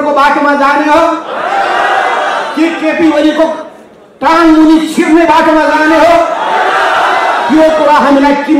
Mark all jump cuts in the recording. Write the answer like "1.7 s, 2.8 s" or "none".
none